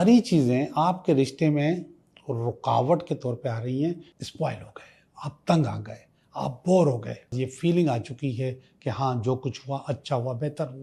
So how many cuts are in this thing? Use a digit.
2